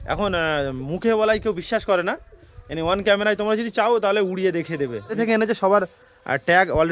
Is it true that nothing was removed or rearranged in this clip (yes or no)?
no